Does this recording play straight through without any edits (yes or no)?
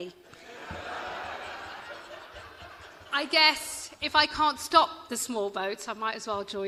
yes